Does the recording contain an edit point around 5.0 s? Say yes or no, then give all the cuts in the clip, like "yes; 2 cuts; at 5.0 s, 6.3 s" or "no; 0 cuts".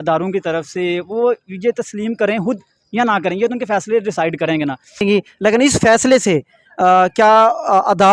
yes; 1 cut; at 5.0 s